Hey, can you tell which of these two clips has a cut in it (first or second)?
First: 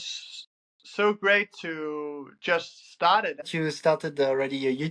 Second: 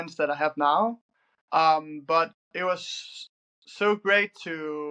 first